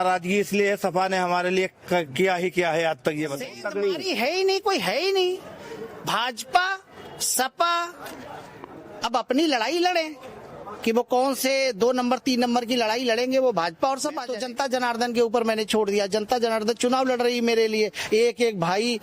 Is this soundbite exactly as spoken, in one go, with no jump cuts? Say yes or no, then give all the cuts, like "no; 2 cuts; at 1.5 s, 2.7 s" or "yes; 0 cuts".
no; 2 cuts; at 3.4 s, 14.2 s